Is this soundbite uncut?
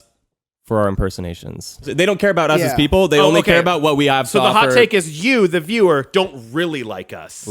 no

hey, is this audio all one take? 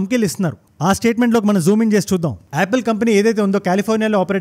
no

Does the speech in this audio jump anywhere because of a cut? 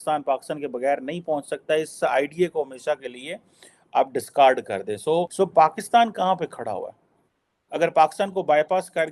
yes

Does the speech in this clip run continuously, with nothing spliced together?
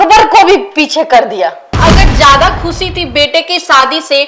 no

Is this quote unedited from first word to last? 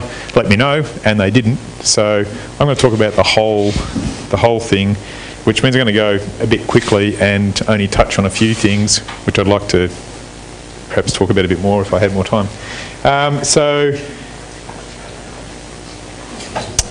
no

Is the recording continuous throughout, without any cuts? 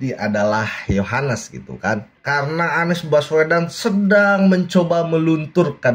no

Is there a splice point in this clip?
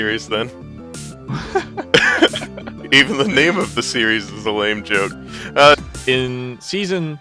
no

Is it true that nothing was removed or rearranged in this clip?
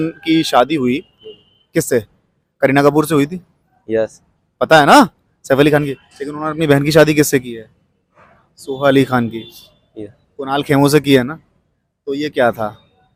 yes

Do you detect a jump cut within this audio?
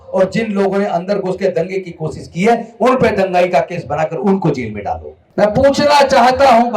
yes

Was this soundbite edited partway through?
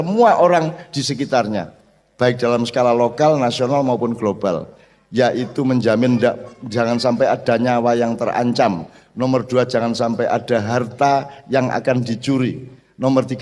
no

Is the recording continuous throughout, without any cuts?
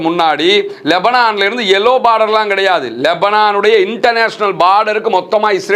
yes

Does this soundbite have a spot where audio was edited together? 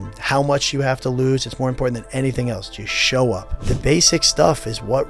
yes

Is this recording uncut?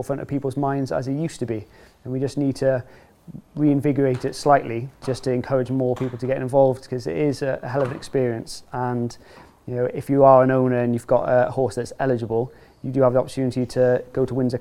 yes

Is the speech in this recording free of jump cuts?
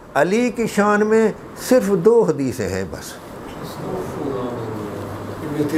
yes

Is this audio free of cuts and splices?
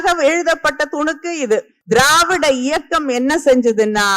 no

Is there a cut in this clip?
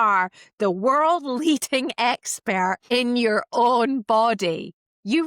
yes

